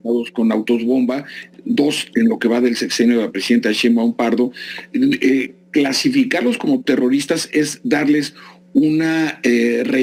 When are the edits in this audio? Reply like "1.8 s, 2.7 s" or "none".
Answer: none

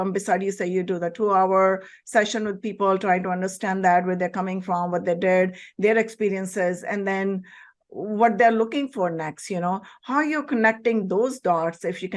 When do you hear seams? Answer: none

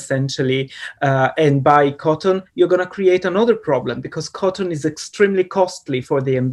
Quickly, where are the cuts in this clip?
none

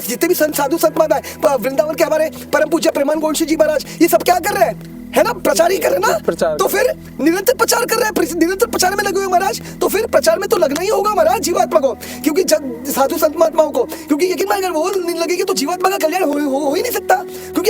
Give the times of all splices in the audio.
none

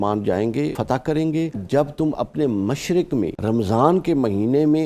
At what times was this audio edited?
0.8 s, 1.6 s, 3.4 s

